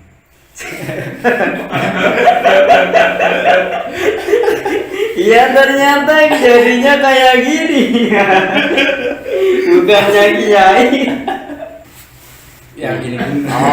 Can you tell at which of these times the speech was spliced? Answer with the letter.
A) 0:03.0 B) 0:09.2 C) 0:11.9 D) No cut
C